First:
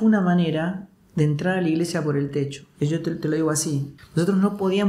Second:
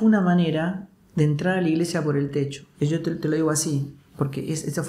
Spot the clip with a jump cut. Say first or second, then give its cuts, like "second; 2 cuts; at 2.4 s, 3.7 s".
first; 1 cut; at 4.0 s